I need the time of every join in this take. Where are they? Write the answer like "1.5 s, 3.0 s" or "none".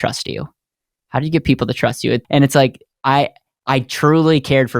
2.2 s